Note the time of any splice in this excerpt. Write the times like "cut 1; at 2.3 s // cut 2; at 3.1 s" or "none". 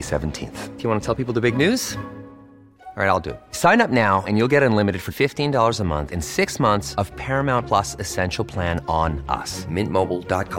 none